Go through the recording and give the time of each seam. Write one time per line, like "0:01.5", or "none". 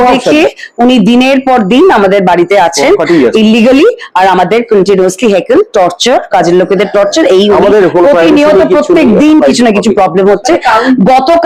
none